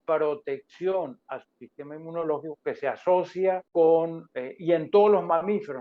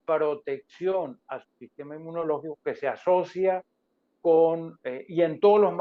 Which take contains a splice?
first; 1 cut; at 3.6 s

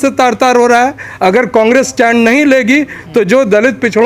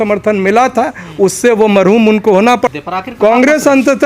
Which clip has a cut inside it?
second; 1 cut; at 2.7 s

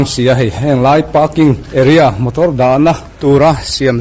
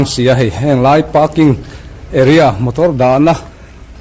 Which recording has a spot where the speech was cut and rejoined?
first; 2 cuts; at 1.6 s, 3.1 s

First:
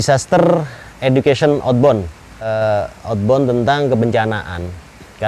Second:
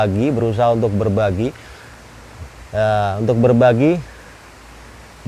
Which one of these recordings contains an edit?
first; 1 cut; at 2.5 s

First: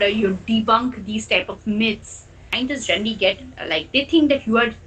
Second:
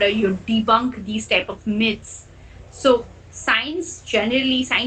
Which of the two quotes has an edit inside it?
first; 1 cut; at 2.5 s

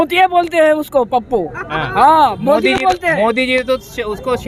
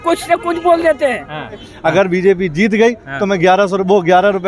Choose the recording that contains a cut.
second; 1 cut; at 1.7 s

